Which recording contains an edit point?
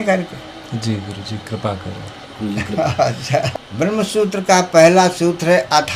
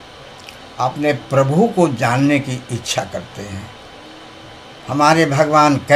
first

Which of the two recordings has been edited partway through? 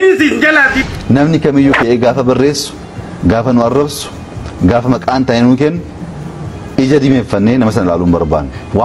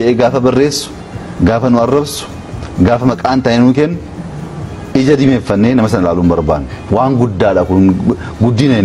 first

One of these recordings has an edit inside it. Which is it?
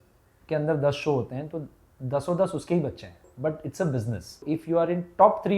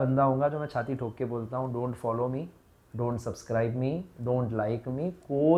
first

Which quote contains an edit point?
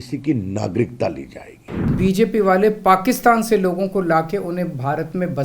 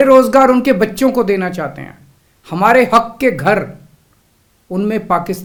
first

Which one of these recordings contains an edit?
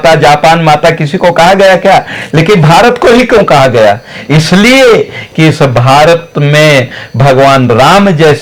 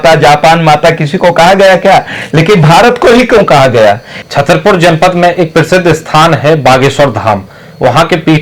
second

